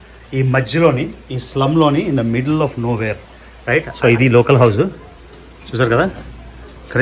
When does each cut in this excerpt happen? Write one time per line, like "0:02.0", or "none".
0:03.6